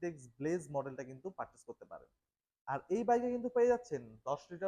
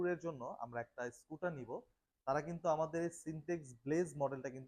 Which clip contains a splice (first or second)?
first